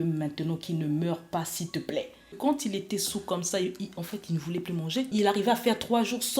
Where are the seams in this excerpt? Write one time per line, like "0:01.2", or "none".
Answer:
0:02.4
0:05.1

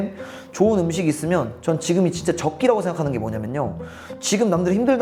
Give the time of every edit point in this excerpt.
none

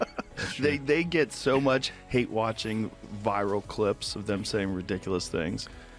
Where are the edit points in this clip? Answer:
0:01.9

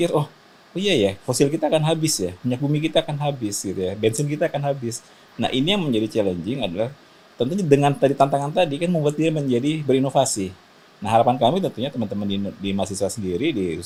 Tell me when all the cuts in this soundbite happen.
none

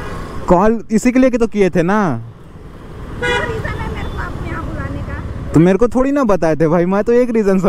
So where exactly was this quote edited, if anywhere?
none

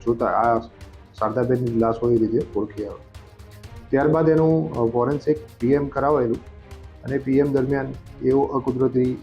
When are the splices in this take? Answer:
none

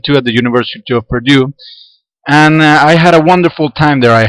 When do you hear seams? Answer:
none

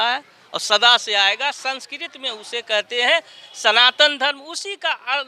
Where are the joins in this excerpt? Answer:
none

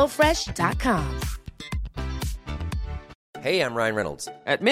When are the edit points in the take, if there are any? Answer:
0:03.1

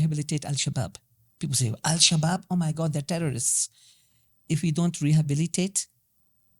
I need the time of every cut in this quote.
none

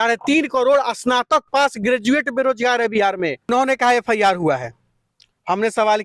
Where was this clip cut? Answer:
0:03.5

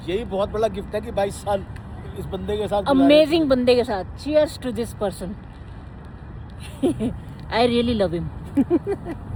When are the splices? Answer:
none

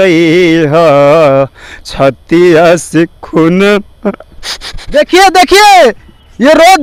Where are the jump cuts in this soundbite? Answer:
none

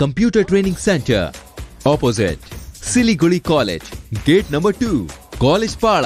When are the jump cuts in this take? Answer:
none

